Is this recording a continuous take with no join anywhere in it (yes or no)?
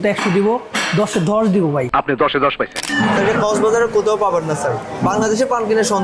no